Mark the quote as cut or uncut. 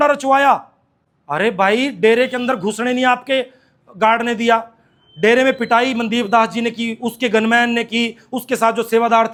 uncut